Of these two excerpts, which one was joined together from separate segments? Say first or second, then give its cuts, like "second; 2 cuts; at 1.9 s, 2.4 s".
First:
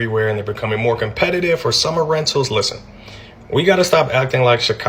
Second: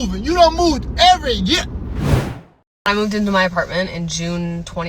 second; 1 cut; at 2.3 s